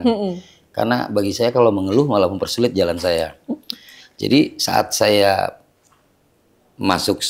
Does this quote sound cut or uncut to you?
uncut